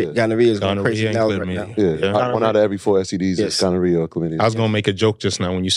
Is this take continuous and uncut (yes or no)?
yes